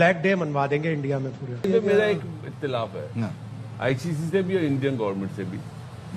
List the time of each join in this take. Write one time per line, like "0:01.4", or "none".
0:01.6